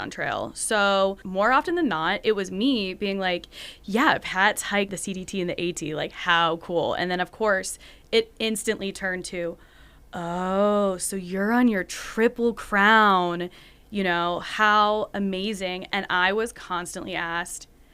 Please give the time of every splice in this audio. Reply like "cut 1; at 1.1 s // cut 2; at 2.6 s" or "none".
cut 1; at 1.2 s // cut 2; at 4.9 s